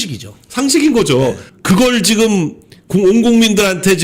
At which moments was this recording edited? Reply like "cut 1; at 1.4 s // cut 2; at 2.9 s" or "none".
cut 1; at 1.5 s